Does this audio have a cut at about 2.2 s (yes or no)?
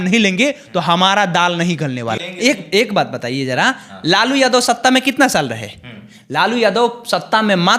yes